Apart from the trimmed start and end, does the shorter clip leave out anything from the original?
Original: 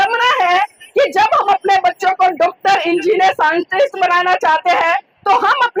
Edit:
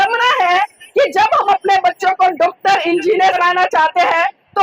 yes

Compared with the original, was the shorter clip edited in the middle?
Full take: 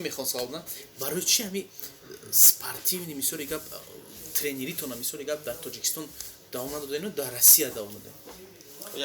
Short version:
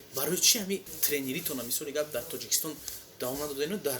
yes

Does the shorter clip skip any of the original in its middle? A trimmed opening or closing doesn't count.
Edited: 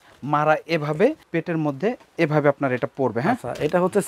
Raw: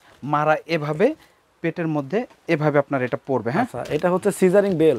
yes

